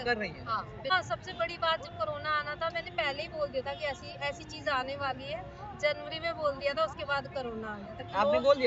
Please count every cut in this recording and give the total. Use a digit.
1